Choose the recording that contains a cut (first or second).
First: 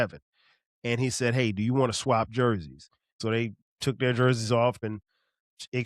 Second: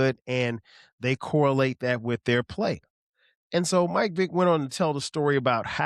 first